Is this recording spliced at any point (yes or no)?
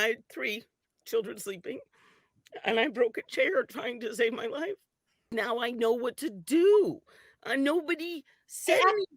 yes